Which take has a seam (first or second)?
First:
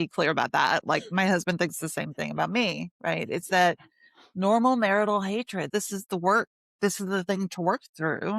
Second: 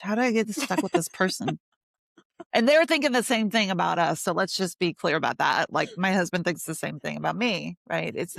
first